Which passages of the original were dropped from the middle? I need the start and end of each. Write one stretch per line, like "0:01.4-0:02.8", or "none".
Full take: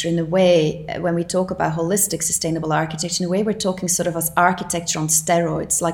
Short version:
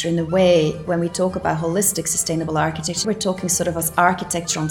0:00.8-0:00.9
0:03.2-0:03.4